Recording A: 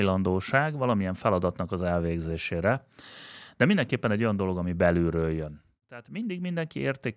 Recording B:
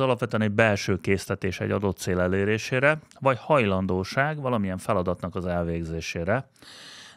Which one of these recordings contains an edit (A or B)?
A